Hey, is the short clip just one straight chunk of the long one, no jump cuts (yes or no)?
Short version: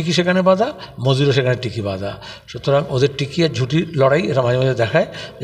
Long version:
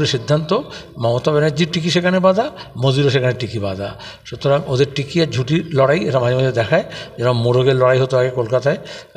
yes